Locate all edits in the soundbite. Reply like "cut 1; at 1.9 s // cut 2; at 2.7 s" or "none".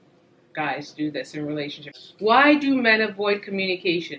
cut 1; at 1.9 s